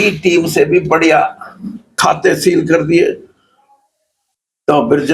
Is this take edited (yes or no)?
yes